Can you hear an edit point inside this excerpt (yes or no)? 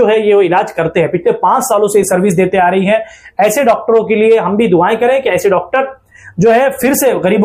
no